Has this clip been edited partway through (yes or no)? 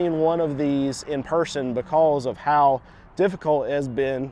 no